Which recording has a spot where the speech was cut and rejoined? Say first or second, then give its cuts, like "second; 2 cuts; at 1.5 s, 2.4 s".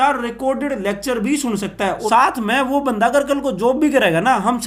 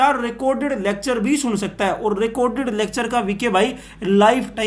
first; 1 cut; at 2.1 s